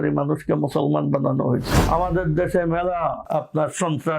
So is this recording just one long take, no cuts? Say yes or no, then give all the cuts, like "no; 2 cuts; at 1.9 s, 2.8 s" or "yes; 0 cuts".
no; 2 cuts; at 1.7 s, 3.2 s